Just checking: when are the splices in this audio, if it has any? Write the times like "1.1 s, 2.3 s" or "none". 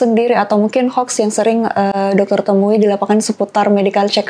none